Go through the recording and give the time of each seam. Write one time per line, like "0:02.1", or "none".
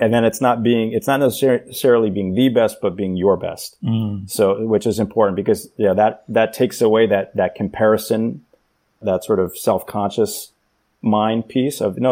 none